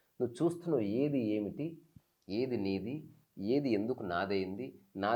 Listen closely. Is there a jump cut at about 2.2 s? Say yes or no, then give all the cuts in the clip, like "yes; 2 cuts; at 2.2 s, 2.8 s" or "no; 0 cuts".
no; 0 cuts